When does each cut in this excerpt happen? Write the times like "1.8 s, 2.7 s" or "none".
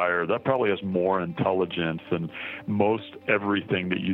none